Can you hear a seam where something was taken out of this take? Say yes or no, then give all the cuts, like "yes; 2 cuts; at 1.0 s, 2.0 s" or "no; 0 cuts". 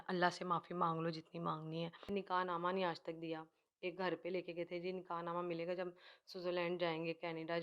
yes; 1 cut; at 2.0 s